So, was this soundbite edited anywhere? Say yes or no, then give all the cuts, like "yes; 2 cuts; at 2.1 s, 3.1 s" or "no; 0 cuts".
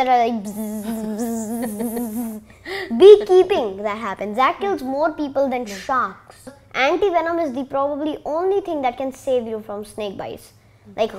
yes; 1 cut; at 6.6 s